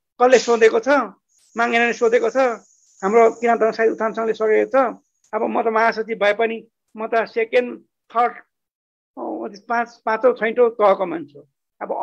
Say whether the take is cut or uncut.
uncut